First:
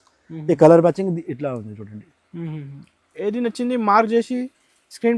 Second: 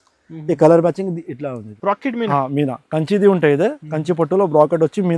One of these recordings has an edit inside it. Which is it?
second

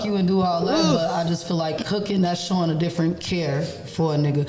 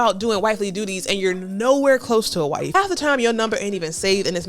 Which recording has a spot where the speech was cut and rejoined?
second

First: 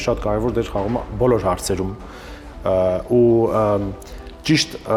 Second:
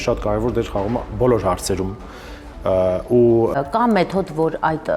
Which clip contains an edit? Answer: second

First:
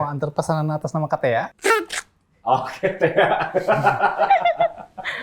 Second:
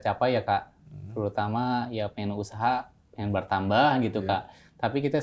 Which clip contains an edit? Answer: first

